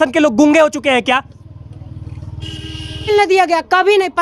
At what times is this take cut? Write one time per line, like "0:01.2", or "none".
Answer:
0:03.1